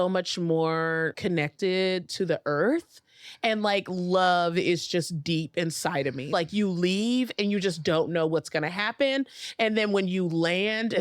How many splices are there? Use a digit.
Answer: 2